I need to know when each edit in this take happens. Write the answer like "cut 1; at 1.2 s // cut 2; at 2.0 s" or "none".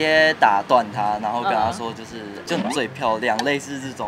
none

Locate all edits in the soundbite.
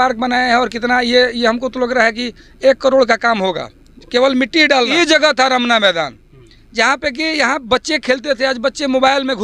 cut 1; at 4.9 s

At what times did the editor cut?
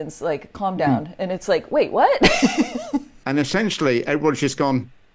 cut 1; at 3.2 s

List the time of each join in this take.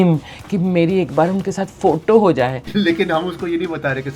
cut 1; at 2.6 s

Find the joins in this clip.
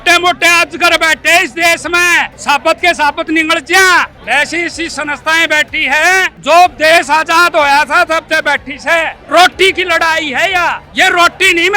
cut 1; at 2.3 s // cut 2; at 4.2 s // cut 3; at 6.3 s // cut 4; at 9.2 s // cut 5; at 10.8 s

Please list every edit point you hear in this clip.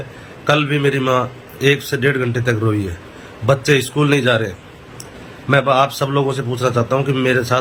none

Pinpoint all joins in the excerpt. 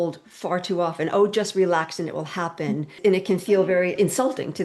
cut 1; at 3.0 s // cut 2; at 4.0 s

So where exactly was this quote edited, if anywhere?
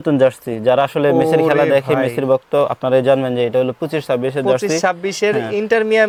none

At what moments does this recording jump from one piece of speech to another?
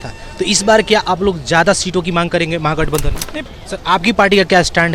cut 1; at 3.3 s

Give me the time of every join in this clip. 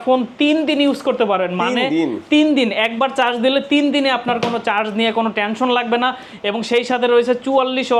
none

